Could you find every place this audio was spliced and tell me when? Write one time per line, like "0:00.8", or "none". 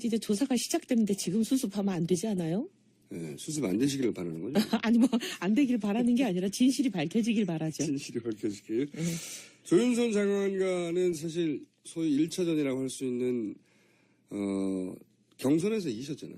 0:11.4